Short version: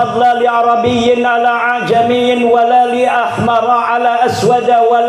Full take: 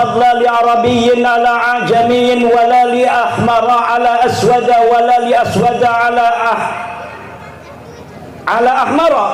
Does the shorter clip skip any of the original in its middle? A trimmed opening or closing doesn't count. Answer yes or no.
no